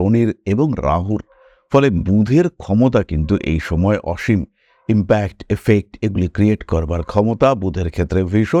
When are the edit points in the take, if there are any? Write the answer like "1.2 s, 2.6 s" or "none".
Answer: none